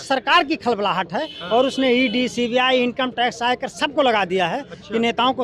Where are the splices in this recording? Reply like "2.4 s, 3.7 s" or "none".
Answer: none